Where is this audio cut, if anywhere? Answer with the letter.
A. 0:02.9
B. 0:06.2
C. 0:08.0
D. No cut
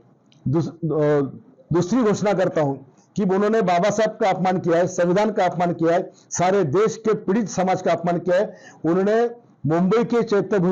D